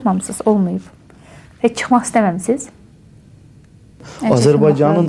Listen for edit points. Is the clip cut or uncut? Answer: cut